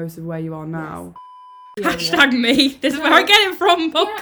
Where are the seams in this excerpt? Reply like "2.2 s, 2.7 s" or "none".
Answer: 1.7 s